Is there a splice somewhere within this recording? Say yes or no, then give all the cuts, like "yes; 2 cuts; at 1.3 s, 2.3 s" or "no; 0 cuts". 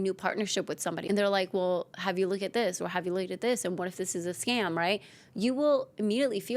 yes; 1 cut; at 1.0 s